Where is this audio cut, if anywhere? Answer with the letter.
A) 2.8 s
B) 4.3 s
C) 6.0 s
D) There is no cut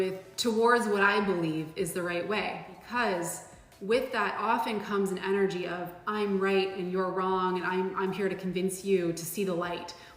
A